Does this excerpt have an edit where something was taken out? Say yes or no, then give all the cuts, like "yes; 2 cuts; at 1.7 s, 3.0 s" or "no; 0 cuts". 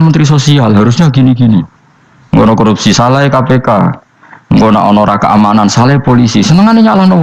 no; 0 cuts